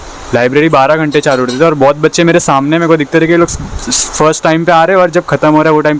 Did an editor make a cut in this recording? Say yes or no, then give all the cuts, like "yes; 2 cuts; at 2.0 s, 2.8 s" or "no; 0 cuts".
no; 0 cuts